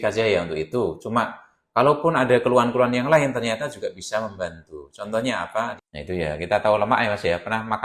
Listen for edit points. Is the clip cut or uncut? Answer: cut